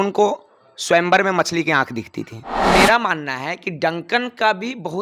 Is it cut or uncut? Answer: cut